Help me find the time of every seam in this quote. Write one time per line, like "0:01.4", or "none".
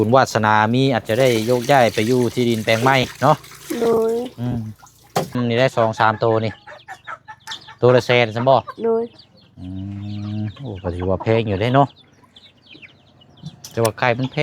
0:05.4